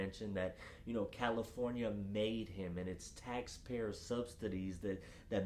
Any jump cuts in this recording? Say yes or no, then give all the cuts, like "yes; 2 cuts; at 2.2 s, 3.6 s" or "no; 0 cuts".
no; 0 cuts